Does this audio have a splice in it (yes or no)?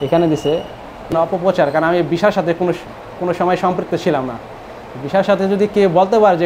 yes